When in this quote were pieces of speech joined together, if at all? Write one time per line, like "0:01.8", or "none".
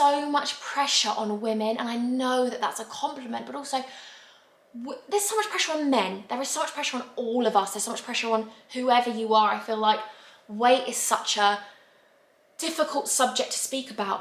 none